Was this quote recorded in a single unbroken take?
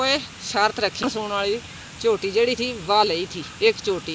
no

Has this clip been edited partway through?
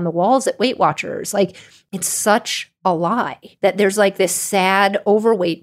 yes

